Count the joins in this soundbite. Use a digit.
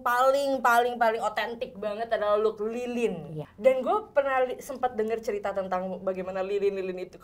1